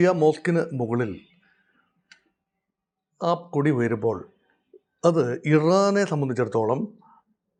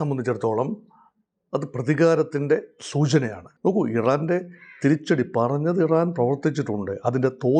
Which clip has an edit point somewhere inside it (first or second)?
second